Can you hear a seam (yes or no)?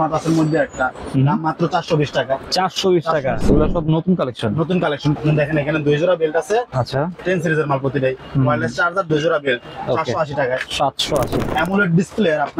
yes